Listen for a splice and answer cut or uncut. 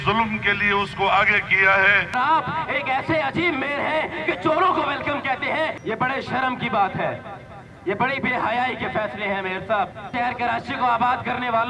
cut